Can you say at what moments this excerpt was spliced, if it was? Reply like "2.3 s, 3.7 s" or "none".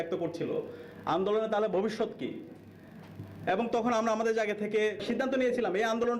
5.0 s